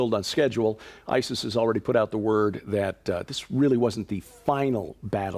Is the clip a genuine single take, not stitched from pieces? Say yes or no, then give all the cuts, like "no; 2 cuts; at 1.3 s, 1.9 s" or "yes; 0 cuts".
no; 1 cut; at 3.1 s